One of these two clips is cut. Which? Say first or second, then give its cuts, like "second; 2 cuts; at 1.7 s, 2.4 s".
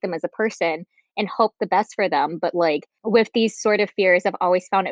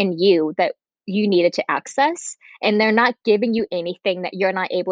first; 1 cut; at 2.9 s